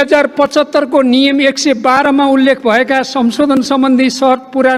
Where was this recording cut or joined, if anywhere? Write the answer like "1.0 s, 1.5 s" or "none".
none